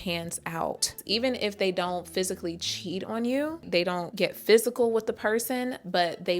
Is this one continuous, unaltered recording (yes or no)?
no